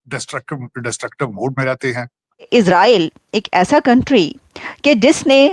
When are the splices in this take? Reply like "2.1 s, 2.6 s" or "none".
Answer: 2.5 s